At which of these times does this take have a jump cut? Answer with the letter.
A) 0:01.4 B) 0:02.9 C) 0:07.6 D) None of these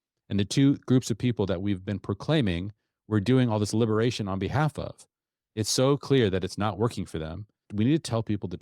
C